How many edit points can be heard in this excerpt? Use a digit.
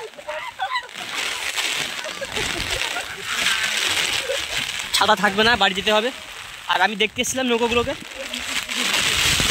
0